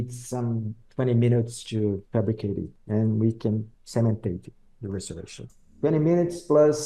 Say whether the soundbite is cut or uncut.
cut